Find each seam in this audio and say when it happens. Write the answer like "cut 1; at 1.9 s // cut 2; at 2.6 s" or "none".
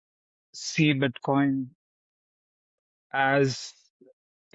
none